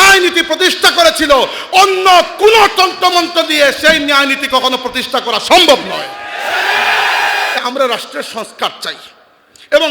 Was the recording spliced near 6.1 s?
no; 1 cut; at 7.6 s

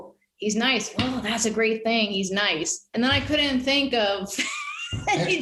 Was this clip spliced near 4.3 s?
no; 1 cut; at 2.9 s

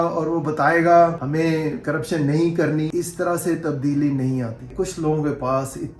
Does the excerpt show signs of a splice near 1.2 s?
yes; 3 cuts; at 1.2 s, 2.9 s, 4.7 s

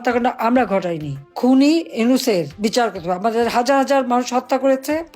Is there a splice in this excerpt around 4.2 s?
no; 1 cut; at 1.2 s

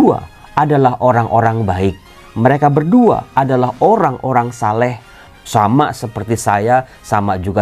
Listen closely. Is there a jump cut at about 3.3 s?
no; 1 cut; at 5.2 s

